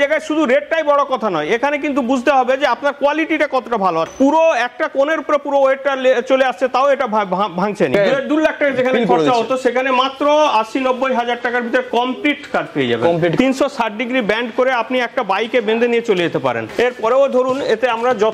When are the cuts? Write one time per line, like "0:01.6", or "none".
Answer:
0:04.1
0:07.9
0:13.3
0:16.6